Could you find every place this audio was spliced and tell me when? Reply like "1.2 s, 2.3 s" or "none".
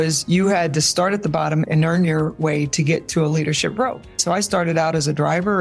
1.7 s, 4.2 s

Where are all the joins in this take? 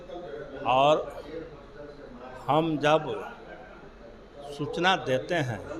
none

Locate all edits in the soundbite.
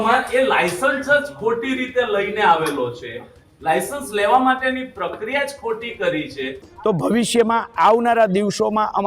6.7 s

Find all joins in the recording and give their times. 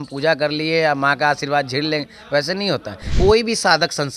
3.1 s

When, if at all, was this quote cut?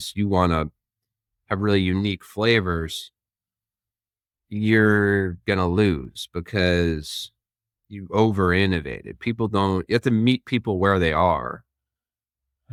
none

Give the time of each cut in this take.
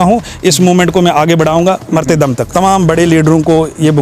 2.4 s

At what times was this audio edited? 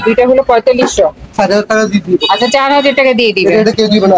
none

